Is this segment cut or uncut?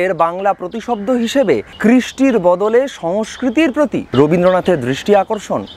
cut